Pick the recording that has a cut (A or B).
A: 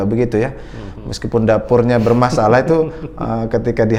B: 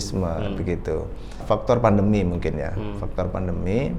B